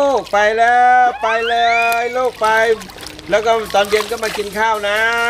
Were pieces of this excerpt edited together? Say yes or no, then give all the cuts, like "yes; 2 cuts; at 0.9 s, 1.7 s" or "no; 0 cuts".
no; 0 cuts